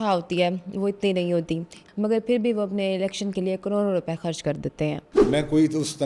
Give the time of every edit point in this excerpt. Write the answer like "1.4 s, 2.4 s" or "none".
1.8 s, 5.1 s